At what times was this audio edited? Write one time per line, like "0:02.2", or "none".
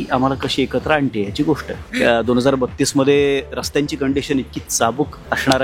0:01.8